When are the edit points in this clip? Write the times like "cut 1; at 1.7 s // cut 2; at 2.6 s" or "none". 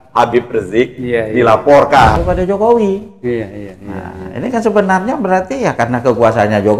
cut 1; at 2.2 s